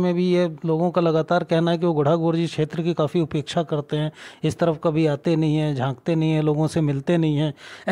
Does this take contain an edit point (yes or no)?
no